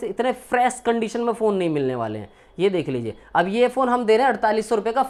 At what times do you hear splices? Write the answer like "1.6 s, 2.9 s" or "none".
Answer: none